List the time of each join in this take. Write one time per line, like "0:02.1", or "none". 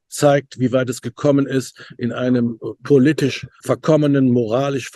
0:03.6